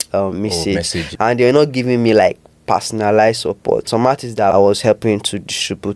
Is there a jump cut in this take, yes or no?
yes